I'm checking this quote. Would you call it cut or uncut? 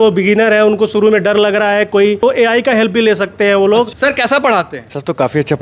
cut